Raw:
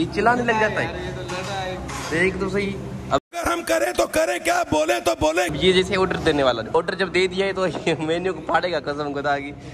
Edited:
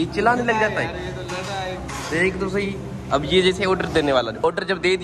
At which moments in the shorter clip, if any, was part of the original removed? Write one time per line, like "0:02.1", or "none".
0:03.2